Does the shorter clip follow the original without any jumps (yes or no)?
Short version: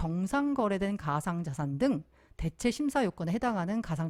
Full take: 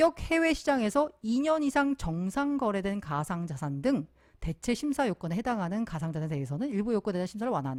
yes